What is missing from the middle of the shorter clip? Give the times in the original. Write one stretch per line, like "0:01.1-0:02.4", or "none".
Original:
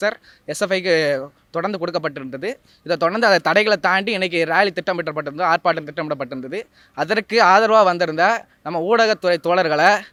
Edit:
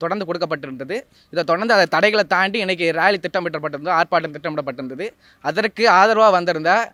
none